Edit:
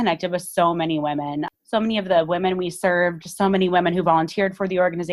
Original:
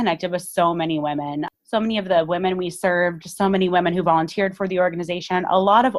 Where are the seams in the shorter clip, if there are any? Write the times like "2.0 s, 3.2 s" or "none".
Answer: none